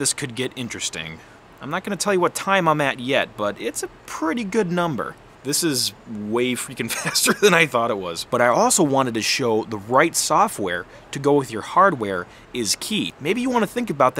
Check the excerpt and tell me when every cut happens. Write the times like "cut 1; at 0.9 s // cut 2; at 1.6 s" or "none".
cut 1; at 5.3 s // cut 2; at 8.2 s // cut 3; at 13.2 s